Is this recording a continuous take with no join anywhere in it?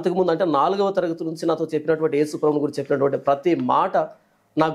yes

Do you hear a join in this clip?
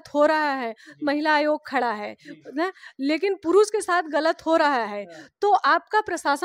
no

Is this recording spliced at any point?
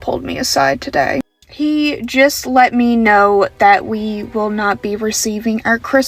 no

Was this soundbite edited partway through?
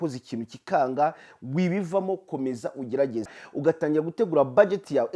yes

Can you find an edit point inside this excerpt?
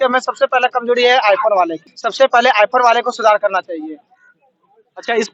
no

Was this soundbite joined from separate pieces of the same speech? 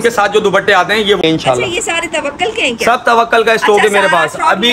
yes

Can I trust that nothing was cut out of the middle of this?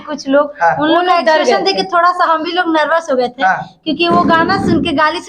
yes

